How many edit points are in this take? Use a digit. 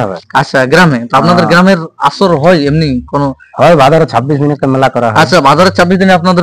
0